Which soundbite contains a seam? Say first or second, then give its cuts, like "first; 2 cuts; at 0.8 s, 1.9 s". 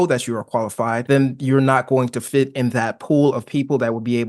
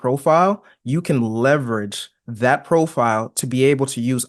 first; 1 cut; at 1.0 s